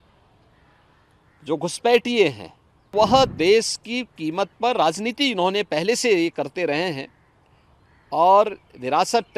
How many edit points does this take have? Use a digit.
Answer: 1